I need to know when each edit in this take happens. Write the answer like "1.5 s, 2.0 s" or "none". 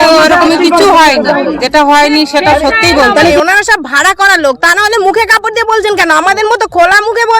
1.6 s, 3.3 s